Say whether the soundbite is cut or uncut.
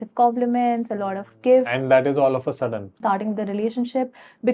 cut